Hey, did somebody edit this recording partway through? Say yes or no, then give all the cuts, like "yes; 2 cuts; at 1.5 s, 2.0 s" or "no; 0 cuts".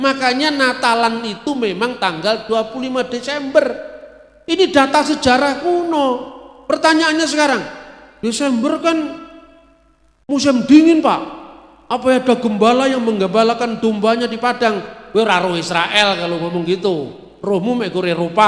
no; 0 cuts